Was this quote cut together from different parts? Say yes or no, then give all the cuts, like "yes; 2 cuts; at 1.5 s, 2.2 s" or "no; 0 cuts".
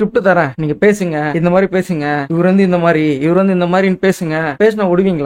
no; 0 cuts